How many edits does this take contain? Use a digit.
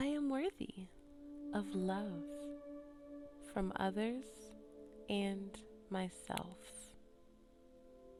0